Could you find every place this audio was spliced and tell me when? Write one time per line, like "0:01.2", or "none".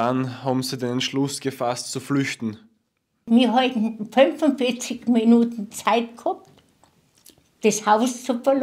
0:03.3

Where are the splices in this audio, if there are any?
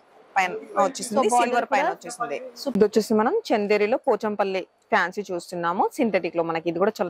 0:02.6

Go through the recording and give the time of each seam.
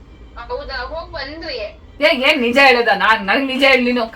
0:01.8

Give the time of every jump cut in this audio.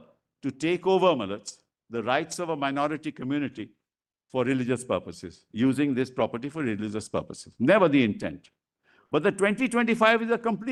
none

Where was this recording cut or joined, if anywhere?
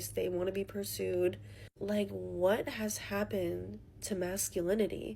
0:02.2

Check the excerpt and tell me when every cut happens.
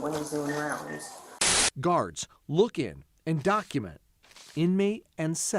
0:01.4

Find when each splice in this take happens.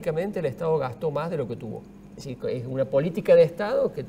none

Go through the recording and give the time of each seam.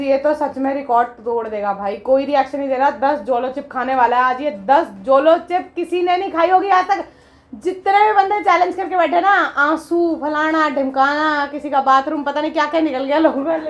none

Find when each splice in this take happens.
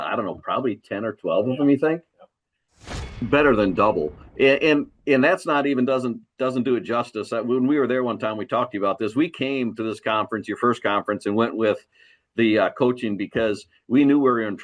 0:03.0

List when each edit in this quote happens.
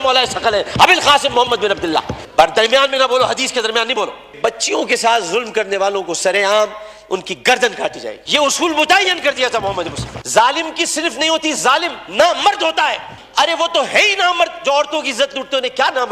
0:04.4
0:10.2
0:13.1

